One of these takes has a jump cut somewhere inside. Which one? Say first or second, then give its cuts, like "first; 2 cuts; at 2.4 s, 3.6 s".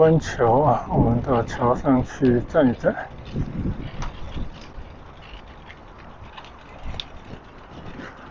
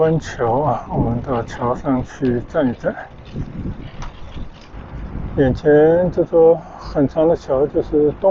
second; 1 cut; at 4.7 s